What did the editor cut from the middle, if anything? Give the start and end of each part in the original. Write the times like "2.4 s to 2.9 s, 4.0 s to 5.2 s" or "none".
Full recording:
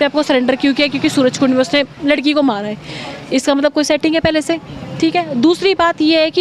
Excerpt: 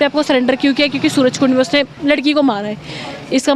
none